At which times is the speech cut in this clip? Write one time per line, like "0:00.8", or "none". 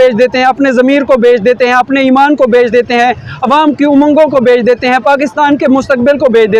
none